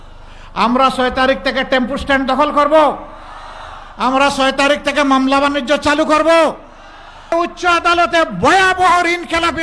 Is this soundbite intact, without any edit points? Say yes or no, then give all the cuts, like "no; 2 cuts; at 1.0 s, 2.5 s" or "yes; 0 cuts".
no; 1 cut; at 7.3 s